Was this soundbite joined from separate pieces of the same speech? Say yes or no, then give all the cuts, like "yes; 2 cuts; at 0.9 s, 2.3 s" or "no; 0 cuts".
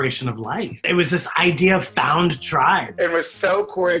yes; 1 cut; at 2.9 s